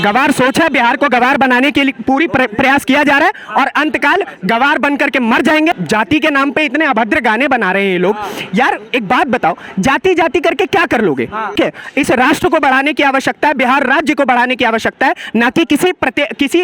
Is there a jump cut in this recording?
yes; 2 cuts; at 5.8 s, 11.6 s

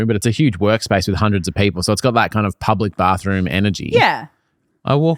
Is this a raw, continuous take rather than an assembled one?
yes; 0 cuts

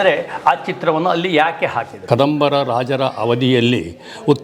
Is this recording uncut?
no; 1 cut; at 1.9 s

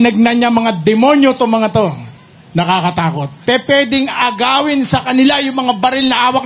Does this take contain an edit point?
yes; 1 cut; at 3.4 s

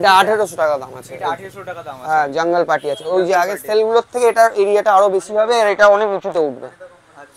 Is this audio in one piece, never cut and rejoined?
yes; 0 cuts

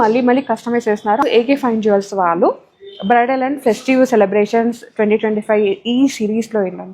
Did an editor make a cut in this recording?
yes; 1 cut; at 1.3 s

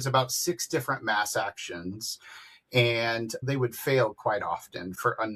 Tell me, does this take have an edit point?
no; 0 cuts

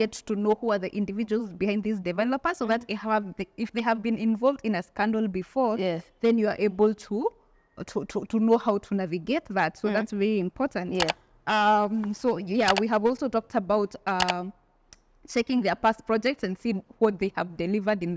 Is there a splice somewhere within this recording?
no; 0 cuts

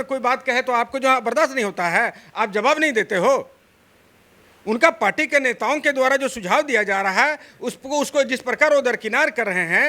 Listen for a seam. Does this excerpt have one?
no; 0 cuts

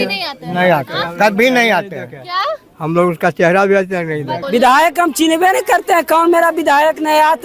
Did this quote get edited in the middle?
yes; 1 cut; at 4.3 s

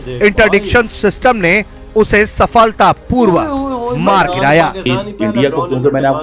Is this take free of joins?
no; 1 cut; at 4.9 s

